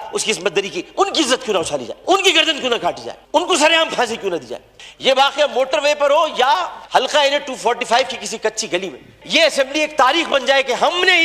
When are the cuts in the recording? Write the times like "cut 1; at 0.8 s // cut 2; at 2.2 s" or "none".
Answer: cut 1; at 1.9 s // cut 2; at 3.1 s // cut 3; at 4.8 s // cut 4; at 9.0 s